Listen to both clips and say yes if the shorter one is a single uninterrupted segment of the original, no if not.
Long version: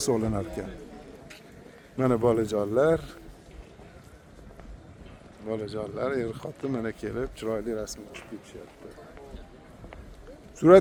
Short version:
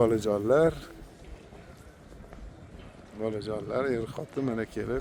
yes